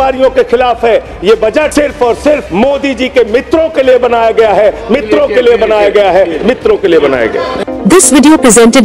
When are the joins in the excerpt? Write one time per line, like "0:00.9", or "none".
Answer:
0:01.7
0:02.5
0:07.6